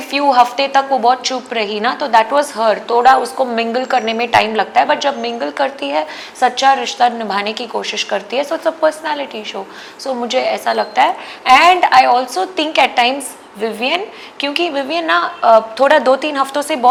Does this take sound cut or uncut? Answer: uncut